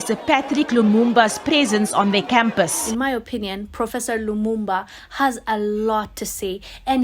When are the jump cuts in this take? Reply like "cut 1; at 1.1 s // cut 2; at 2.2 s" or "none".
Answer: cut 1; at 2.8 s